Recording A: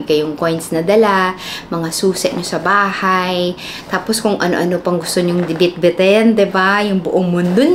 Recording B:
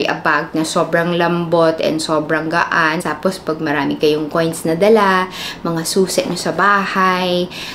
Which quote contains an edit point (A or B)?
B